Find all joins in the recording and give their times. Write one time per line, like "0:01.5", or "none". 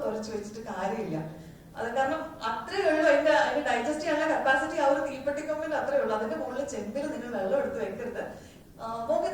0:08.4